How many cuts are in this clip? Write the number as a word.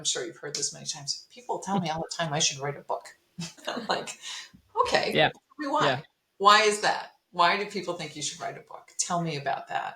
one